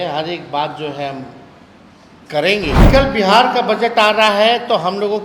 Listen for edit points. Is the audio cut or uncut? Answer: cut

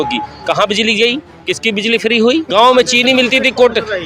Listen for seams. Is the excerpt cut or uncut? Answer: cut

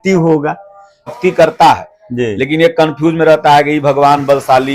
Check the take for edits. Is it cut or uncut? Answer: cut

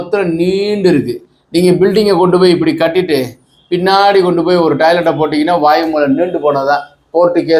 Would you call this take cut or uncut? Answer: uncut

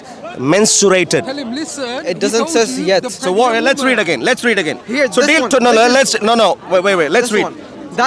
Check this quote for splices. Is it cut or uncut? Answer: uncut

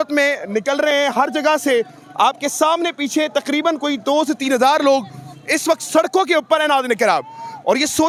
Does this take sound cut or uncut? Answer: uncut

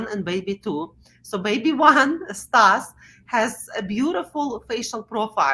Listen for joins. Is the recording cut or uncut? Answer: uncut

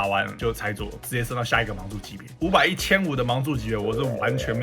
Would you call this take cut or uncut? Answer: cut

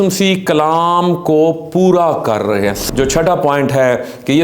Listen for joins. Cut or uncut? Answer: cut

